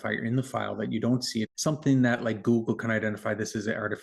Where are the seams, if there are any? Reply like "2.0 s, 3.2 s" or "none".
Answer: 1.5 s